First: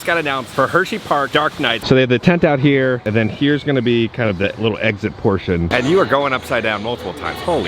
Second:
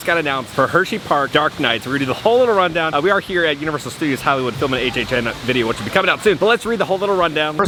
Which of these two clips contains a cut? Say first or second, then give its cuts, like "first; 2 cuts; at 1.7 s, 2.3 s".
first; 2 cuts; at 1.8 s, 5.7 s